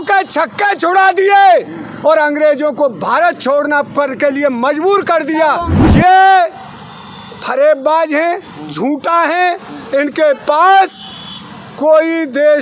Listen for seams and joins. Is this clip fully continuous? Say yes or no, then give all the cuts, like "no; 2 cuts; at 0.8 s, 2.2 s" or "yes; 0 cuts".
no; 1 cut; at 5.8 s